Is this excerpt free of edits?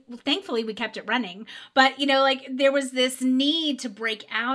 no; 1 cut; at 3.2 s

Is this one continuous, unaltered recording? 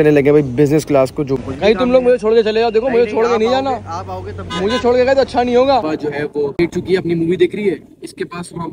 no; 2 cuts; at 1.4 s, 5.8 s

